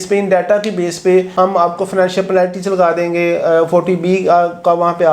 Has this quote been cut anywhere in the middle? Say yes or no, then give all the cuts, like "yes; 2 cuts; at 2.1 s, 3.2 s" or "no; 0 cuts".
no; 0 cuts